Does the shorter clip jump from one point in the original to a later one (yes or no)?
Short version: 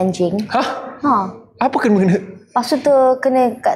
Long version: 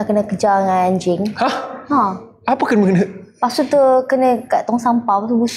no